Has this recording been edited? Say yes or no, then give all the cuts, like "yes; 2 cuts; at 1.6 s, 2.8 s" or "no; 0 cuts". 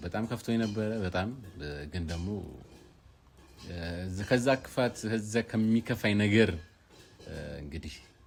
no; 0 cuts